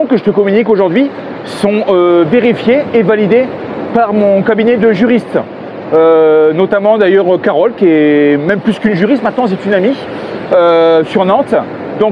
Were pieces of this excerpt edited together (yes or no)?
no